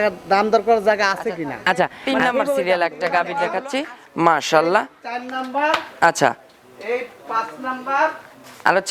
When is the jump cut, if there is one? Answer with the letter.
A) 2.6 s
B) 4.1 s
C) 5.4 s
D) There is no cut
A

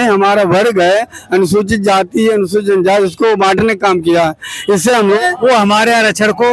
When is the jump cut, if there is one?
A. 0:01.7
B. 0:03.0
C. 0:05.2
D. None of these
C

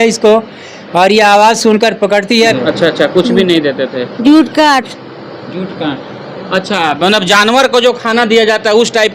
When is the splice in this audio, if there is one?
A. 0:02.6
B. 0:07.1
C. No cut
A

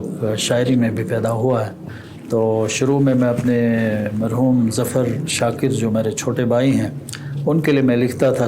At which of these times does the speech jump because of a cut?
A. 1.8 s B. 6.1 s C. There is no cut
A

